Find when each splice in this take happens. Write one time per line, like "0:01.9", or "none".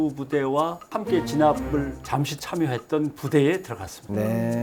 none